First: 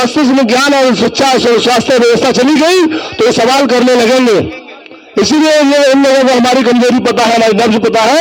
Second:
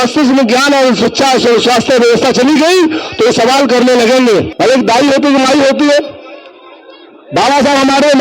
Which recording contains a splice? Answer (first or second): second